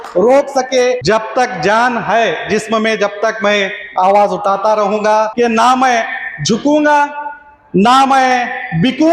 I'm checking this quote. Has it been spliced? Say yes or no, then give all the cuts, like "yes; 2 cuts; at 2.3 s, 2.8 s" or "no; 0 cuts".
yes; 2 cuts; at 1.0 s, 5.3 s